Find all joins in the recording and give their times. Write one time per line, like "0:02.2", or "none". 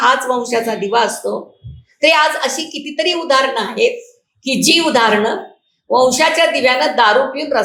none